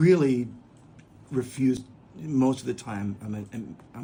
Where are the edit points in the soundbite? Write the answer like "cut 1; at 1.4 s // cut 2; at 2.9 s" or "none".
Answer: none

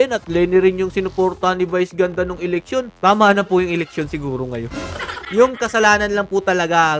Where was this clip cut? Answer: cut 1; at 5.1 s

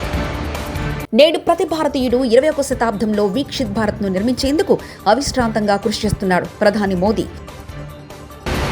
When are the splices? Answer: cut 1; at 1.1 s

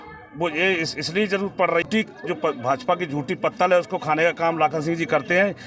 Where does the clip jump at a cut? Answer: cut 1; at 1.8 s

